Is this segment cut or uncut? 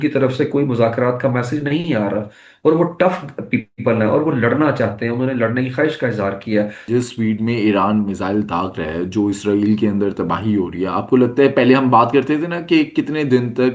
cut